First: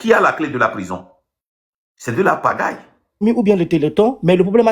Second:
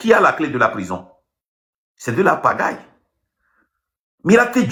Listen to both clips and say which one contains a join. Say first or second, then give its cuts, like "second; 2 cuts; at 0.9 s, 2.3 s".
first; 1 cut; at 3.2 s